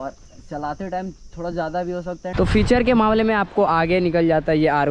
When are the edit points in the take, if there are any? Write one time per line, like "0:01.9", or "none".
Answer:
0:02.3